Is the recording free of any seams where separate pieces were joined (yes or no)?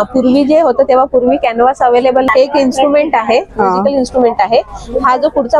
no